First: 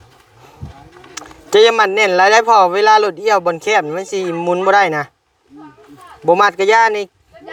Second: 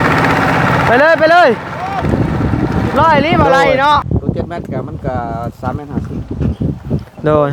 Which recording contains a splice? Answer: second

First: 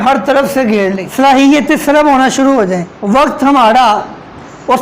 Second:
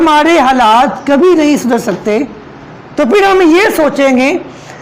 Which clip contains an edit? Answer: first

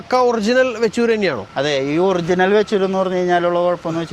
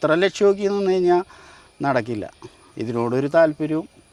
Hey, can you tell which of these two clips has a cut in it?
first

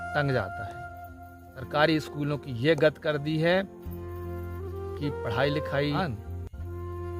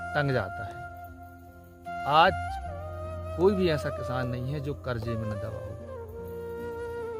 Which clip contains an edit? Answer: first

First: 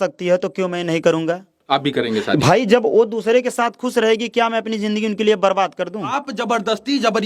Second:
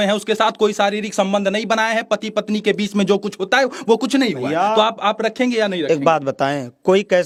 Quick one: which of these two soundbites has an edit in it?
first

